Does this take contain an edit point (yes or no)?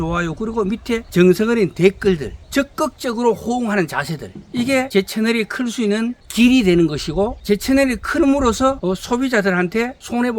yes